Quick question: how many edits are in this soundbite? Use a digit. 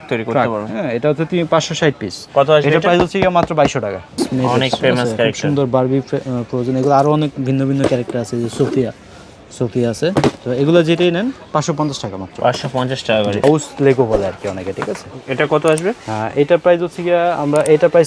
2